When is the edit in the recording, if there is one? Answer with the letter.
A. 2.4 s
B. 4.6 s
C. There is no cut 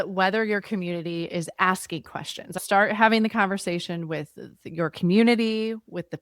A